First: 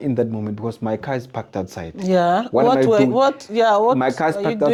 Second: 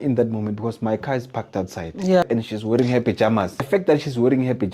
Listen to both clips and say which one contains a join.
second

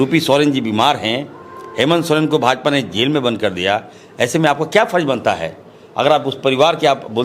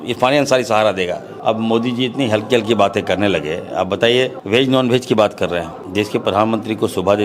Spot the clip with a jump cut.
second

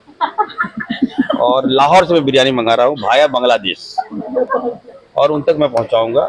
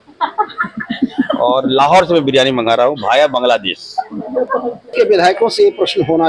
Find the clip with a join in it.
second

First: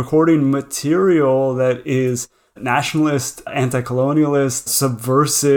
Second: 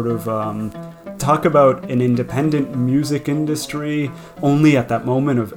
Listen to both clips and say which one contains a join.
first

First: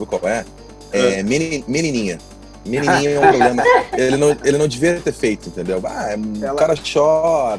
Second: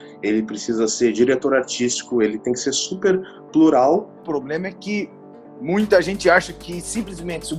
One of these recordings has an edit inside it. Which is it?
second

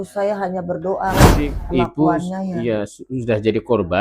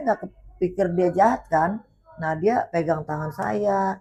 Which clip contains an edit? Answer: first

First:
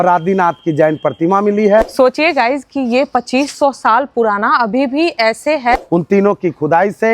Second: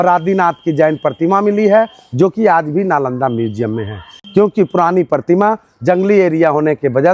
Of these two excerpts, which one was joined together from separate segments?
first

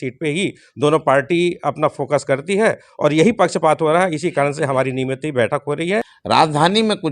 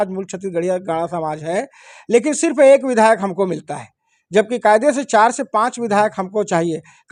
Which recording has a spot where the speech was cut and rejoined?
first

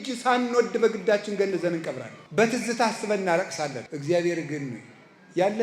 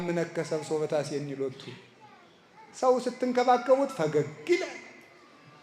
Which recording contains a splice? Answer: first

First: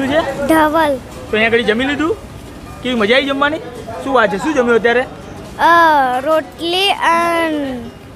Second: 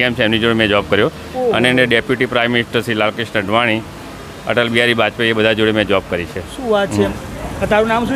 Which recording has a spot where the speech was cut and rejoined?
second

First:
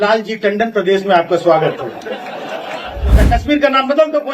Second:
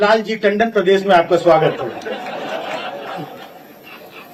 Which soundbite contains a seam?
first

